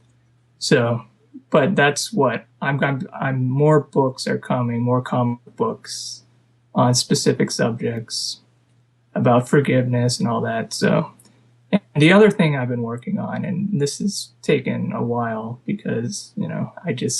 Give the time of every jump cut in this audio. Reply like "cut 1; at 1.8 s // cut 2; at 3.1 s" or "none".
cut 1; at 5.1 s

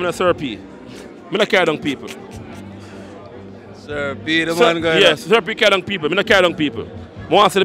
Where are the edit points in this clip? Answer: none

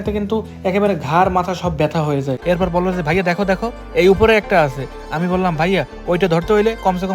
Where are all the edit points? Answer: cut 1; at 2.4 s

